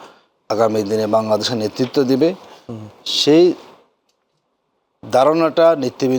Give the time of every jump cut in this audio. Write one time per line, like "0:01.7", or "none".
none